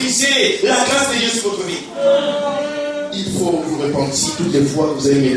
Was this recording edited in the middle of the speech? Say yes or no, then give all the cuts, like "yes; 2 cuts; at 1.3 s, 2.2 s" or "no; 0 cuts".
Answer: yes; 1 cut; at 3.2 s